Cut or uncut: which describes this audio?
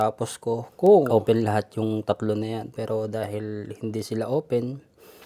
cut